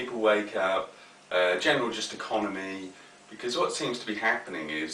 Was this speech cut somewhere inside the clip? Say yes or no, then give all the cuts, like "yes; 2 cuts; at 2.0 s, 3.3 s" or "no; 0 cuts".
yes; 1 cut; at 1.2 s